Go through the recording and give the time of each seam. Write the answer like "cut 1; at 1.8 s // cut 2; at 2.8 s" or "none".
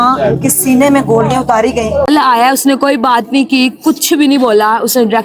cut 1; at 2.1 s